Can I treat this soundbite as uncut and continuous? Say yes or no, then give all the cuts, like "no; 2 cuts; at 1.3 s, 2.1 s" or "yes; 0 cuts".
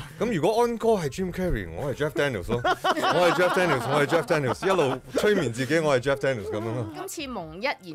no; 1 cut; at 7.0 s